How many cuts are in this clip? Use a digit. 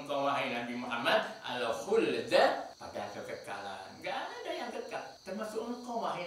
2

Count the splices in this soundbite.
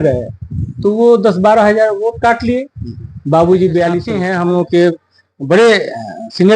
1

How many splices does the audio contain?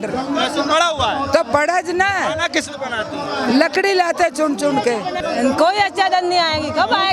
1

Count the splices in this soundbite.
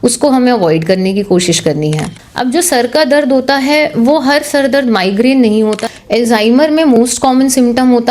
2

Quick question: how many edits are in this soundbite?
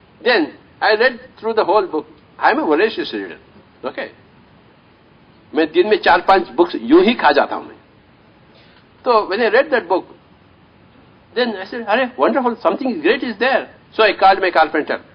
0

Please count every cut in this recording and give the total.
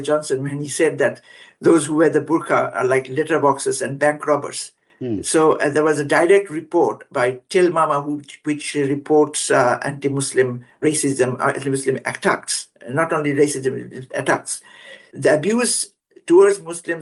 0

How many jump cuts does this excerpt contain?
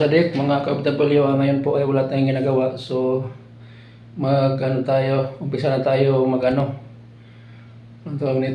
0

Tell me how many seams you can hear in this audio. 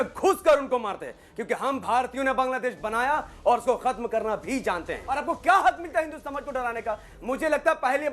1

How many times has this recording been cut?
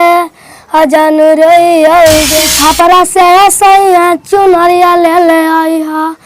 1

